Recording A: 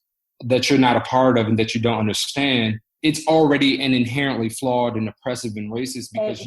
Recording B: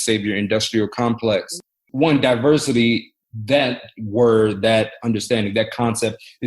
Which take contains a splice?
B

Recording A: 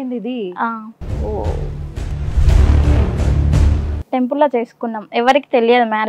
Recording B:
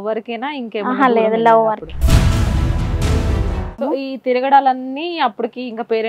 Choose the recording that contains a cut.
B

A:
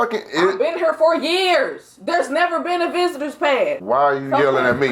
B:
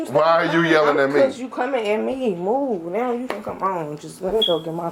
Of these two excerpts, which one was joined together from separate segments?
A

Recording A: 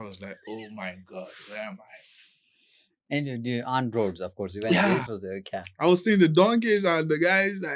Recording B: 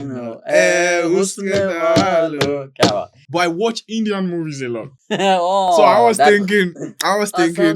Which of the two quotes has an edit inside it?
B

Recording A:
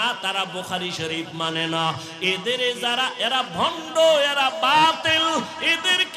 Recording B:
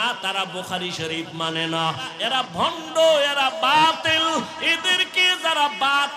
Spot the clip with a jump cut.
B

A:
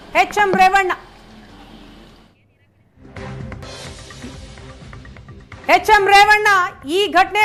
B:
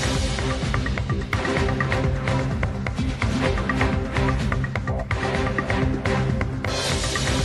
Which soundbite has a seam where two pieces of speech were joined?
B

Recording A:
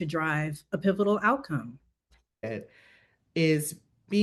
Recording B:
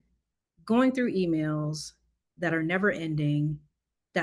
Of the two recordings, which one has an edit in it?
A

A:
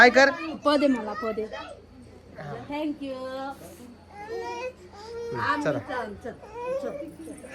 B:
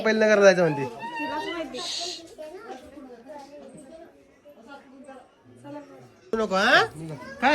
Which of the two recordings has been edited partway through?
B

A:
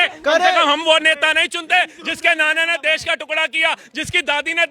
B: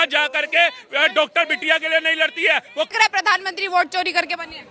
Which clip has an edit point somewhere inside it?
B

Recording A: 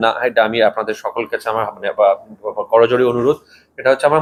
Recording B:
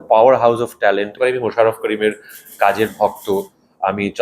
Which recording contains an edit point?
B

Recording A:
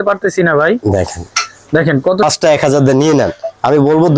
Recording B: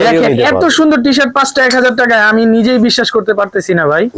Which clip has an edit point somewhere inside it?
A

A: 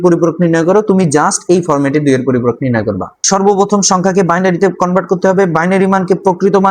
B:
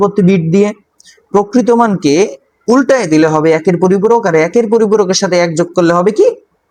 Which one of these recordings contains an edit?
A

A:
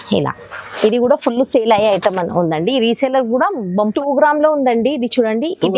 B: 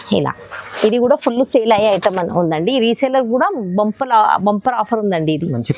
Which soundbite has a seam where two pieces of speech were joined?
A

